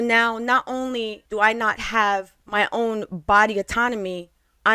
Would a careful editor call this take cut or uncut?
cut